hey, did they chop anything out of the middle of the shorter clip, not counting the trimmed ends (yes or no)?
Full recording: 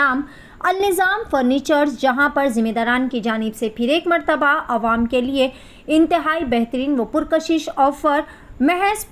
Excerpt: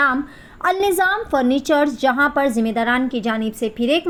no